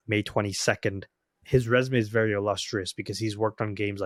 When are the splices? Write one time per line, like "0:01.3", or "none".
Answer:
none